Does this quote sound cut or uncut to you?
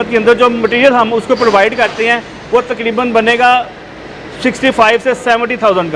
uncut